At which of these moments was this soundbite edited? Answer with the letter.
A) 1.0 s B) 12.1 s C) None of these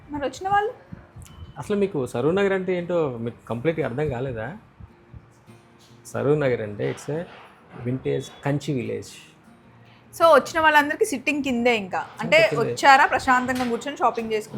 C